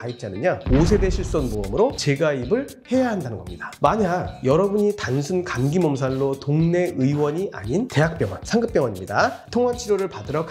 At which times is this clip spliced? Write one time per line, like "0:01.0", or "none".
0:03.7